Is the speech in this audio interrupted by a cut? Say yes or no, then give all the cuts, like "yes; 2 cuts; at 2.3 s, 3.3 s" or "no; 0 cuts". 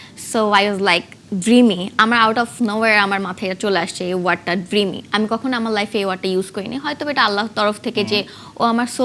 no; 0 cuts